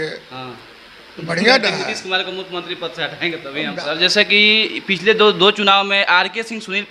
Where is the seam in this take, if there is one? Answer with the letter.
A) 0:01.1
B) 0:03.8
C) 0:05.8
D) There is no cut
B